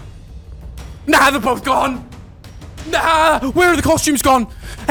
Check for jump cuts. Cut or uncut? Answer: uncut